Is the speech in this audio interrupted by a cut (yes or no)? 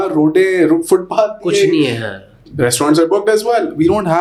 no